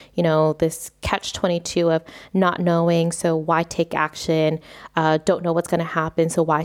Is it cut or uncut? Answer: uncut